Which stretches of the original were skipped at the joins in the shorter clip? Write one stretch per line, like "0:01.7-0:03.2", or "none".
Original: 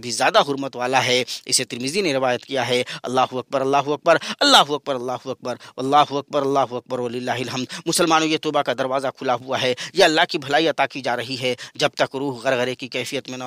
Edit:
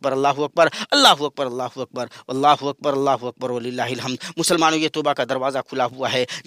none